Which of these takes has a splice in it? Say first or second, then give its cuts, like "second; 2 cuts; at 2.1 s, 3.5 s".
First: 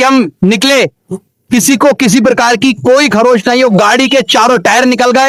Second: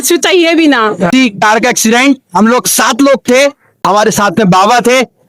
second; 2 cuts; at 1.1 s, 3.7 s